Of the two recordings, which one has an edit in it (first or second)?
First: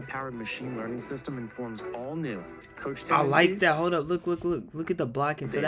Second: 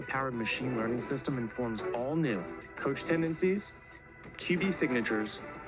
second